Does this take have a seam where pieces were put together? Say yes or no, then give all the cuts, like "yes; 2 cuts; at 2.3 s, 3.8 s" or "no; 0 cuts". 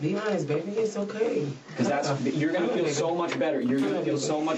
yes; 1 cut; at 1.0 s